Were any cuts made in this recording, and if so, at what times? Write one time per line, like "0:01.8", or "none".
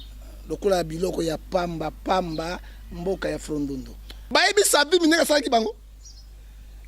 0:04.1